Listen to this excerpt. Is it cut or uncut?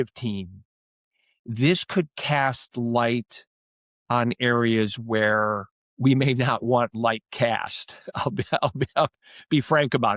uncut